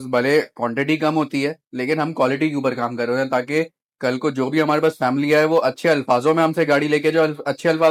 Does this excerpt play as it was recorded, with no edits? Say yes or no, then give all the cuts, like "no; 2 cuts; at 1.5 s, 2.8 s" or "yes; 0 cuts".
yes; 0 cuts